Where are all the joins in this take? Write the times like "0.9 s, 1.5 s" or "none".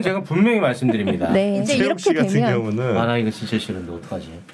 1.7 s